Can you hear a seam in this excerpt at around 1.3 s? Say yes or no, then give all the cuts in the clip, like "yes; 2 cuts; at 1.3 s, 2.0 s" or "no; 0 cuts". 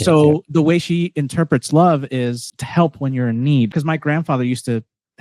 no; 2 cuts; at 2.5 s, 3.7 s